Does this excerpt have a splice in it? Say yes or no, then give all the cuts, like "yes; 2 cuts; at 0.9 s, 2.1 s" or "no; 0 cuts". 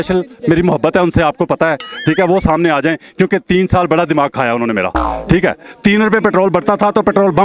no; 0 cuts